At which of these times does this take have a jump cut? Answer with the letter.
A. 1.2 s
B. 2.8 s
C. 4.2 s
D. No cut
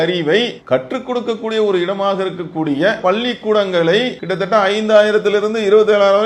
C